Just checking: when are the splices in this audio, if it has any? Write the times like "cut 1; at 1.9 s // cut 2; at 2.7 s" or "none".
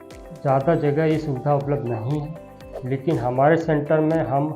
none

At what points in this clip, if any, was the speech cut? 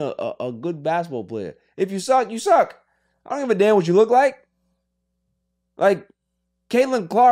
none

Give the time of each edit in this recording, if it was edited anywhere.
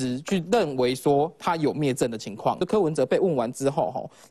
cut 1; at 2.6 s

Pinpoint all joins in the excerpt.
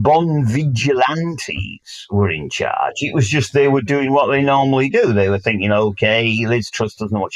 none

